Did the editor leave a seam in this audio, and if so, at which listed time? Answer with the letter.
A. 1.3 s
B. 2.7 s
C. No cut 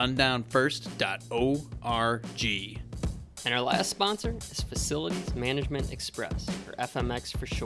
B